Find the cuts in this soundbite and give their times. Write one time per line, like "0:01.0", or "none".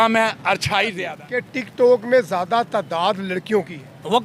0:00.9